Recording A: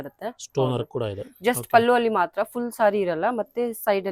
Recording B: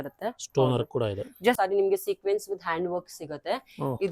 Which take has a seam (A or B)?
B